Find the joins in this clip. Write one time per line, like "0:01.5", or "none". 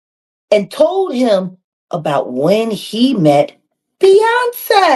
none